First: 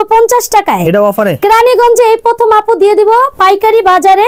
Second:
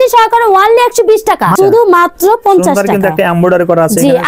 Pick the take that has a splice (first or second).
second